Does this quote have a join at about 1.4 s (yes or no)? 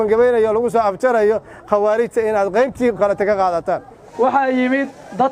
no